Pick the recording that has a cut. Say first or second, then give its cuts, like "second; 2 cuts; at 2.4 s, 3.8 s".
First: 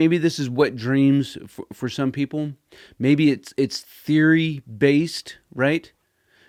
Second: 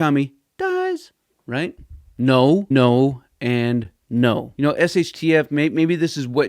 second; 2 cuts; at 2.7 s, 4.5 s